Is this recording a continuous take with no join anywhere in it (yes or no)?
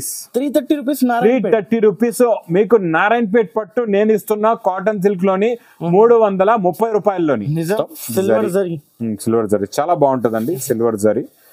no